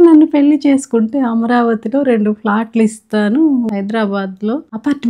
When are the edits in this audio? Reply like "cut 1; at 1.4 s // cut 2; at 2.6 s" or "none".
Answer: cut 1; at 3.7 s